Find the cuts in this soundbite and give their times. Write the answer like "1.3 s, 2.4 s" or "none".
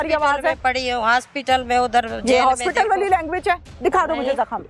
3.7 s